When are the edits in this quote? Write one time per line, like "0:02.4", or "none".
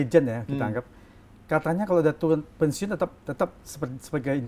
none